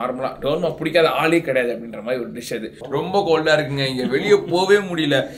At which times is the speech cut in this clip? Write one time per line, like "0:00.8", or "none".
0:02.7